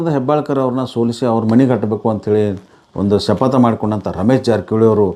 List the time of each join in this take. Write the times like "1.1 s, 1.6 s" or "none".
none